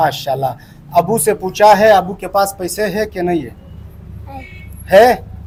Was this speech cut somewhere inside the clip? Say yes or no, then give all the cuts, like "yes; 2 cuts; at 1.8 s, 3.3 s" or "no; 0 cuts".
no; 0 cuts